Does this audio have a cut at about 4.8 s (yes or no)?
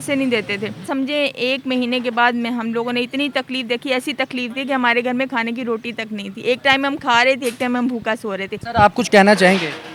no